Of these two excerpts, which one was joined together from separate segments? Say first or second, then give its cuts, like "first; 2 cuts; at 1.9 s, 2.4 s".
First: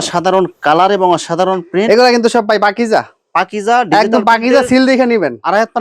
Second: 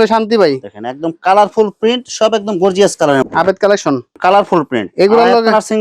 second; 1 cut; at 3.2 s